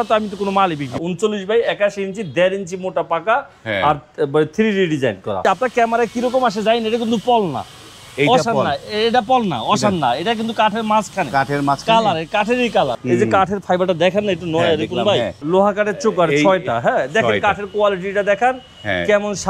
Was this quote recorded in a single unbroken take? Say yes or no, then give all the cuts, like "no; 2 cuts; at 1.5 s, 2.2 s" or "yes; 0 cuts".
no; 4 cuts; at 0.9 s, 5.4 s, 12.9 s, 15.4 s